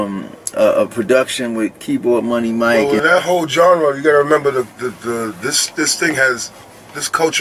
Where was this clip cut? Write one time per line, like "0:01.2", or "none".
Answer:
0:02.9

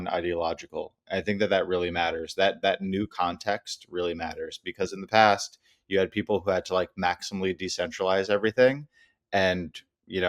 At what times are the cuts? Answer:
none

